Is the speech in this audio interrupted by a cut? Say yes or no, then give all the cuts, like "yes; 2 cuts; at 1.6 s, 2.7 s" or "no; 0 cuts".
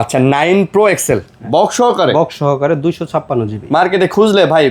no; 0 cuts